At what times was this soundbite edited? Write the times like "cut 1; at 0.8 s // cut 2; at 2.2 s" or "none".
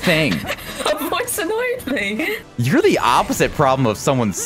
cut 1; at 2.2 s